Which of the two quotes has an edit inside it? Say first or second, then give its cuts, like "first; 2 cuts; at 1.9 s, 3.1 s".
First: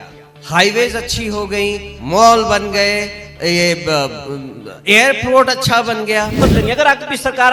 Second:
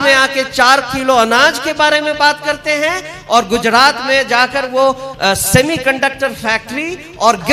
first; 1 cut; at 6.4 s